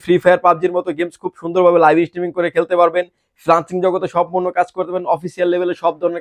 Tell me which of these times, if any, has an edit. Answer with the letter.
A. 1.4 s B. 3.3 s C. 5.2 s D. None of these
D